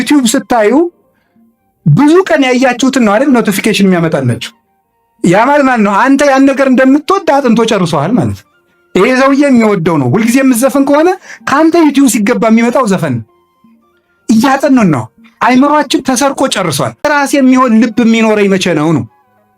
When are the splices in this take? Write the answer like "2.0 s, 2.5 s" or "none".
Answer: 17.0 s